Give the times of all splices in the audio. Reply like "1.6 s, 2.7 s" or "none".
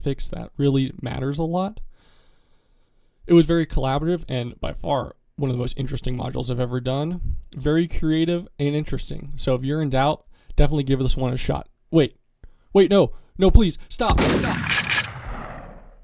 14.1 s